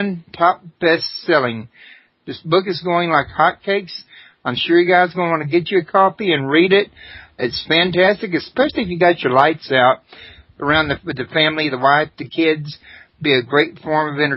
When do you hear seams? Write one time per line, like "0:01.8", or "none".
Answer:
0:07.4